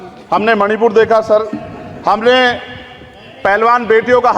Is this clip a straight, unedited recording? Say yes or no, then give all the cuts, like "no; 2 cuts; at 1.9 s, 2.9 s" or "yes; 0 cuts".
yes; 0 cuts